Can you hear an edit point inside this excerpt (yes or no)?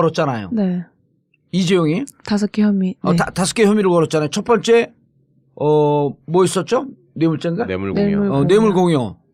no